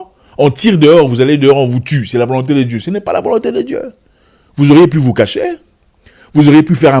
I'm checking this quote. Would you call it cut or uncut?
uncut